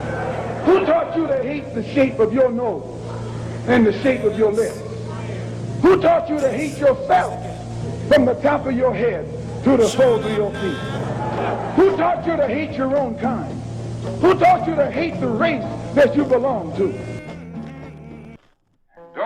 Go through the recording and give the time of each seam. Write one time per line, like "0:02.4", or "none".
0:18.3